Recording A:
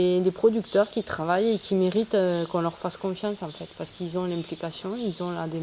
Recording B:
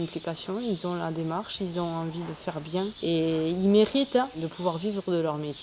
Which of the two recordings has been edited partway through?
B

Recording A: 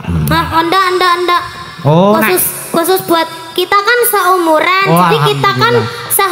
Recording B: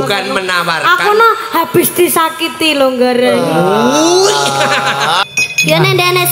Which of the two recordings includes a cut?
B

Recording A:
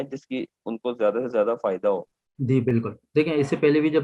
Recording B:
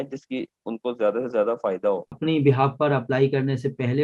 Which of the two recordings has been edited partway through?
B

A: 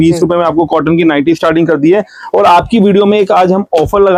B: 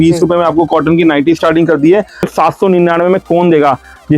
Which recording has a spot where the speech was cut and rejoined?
B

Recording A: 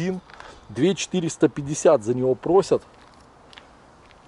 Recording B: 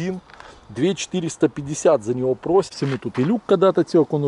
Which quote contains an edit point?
B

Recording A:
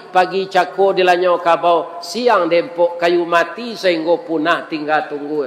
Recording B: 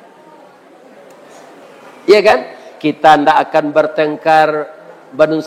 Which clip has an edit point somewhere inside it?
B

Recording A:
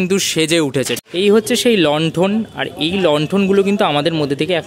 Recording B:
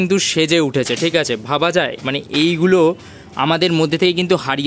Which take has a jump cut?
A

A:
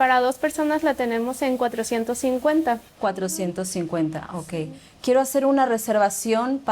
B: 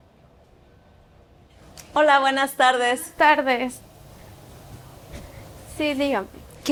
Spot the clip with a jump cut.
A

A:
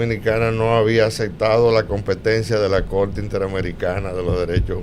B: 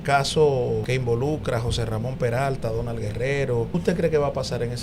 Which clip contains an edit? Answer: B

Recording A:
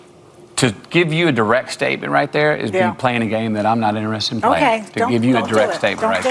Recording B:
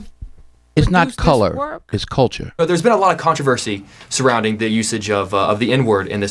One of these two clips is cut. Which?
B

